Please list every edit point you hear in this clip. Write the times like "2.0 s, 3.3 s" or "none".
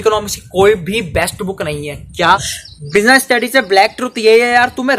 2.8 s